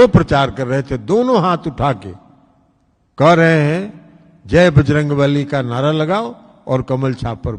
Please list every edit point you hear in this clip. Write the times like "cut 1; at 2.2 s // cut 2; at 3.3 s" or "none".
none